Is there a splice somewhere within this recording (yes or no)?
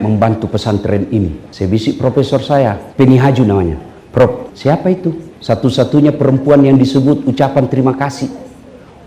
yes